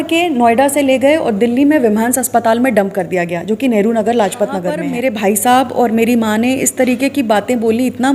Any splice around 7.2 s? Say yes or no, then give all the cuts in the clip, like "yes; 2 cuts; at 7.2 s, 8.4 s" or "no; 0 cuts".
no; 1 cut; at 4.8 s